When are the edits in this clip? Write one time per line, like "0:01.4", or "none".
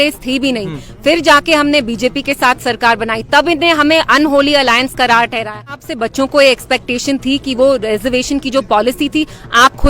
0:05.8